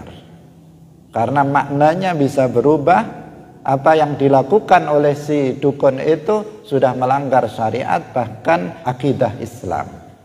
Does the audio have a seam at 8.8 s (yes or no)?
yes